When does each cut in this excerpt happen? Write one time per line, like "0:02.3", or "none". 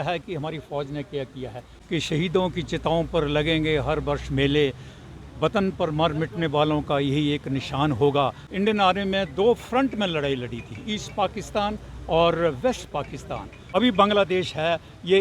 0:01.8
0:08.4
0:13.6